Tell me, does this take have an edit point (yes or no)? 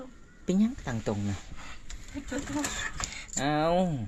no